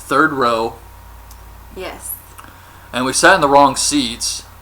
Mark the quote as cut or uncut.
cut